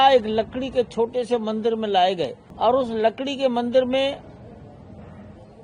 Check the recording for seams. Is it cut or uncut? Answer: cut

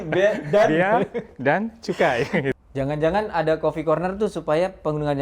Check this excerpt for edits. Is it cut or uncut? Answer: cut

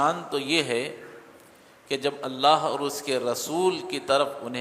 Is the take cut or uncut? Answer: uncut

